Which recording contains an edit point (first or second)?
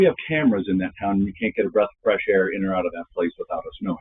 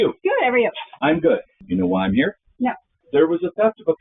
second